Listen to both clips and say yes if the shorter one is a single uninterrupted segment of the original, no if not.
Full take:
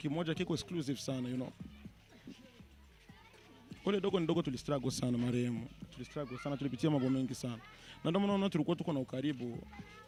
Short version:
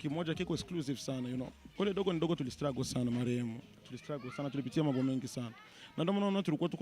no